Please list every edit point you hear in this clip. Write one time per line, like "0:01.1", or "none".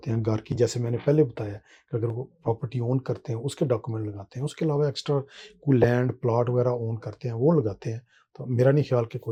none